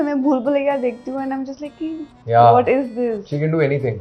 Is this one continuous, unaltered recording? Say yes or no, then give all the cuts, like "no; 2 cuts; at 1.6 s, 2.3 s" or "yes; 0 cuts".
yes; 0 cuts